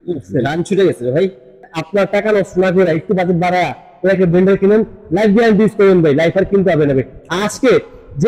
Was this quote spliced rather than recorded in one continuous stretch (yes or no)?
yes